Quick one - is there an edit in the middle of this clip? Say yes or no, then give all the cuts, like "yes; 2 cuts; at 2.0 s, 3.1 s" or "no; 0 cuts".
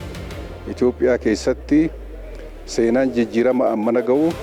no; 0 cuts